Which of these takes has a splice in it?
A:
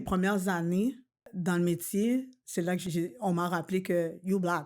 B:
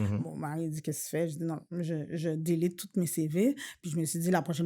A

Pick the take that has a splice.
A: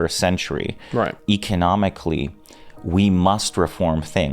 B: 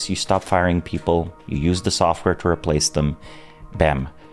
A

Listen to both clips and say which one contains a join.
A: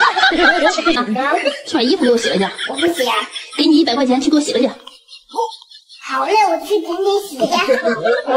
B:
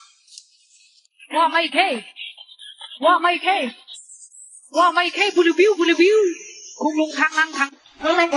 A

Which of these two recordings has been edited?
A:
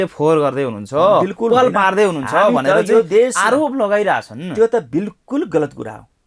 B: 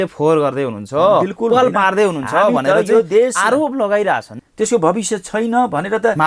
B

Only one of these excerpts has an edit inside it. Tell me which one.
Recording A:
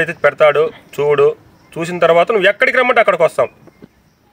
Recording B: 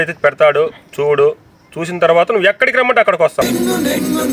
B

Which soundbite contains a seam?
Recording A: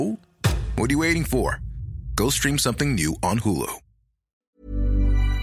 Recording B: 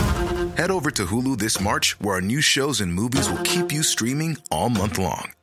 A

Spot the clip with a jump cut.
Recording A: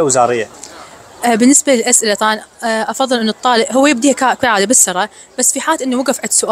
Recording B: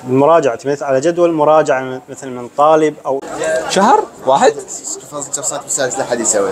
B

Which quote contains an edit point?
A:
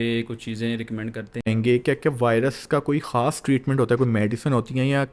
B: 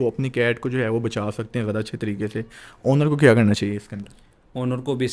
A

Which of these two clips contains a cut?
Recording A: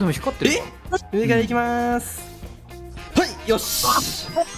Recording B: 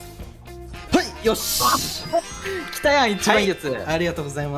A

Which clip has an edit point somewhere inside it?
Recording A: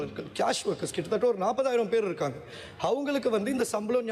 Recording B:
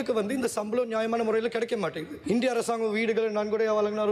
B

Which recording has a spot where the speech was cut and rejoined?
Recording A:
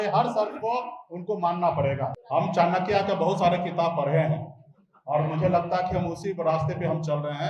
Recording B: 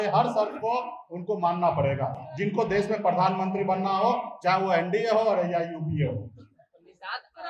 A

